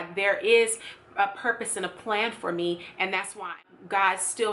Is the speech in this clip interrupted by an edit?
yes; 1 cut; at 3.6 s

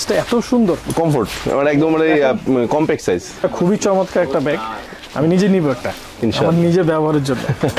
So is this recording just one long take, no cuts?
no; 1 cut; at 3.4 s

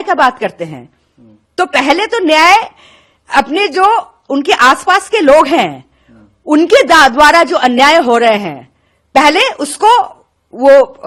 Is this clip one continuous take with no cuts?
yes; 0 cuts

